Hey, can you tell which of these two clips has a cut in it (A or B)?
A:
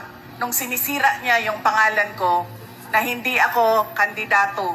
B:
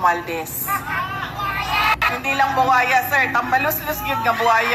B